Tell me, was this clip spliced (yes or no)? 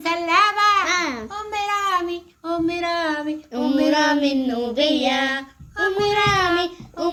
no